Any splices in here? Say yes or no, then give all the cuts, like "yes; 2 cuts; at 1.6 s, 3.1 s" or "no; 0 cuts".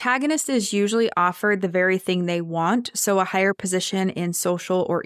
no; 0 cuts